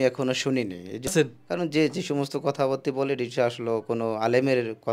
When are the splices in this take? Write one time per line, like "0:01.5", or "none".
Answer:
0:01.1